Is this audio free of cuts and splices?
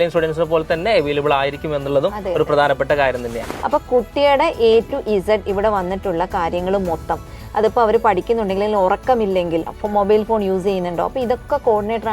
no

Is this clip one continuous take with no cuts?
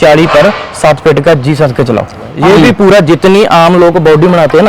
no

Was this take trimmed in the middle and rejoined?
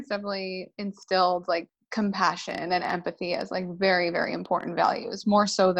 yes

